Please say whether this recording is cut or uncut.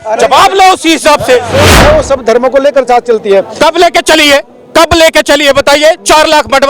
cut